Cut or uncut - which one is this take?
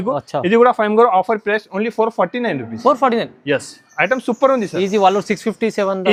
uncut